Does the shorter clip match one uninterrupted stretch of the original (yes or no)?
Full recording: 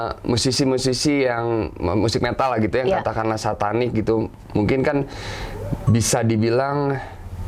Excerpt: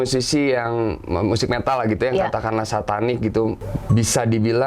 no